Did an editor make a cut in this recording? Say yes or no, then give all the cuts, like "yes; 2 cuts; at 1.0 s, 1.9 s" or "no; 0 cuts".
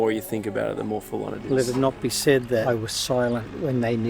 yes; 2 cuts; at 1.5 s, 2.6 s